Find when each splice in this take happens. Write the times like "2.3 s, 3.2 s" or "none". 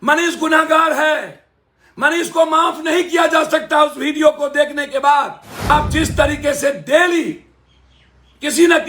5.7 s